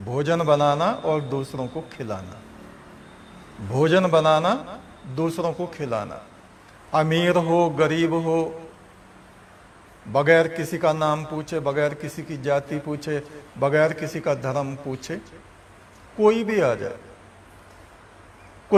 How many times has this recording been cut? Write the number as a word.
zero